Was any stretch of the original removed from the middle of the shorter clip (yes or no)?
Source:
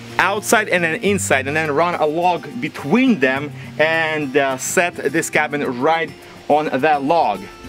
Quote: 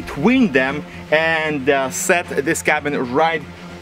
no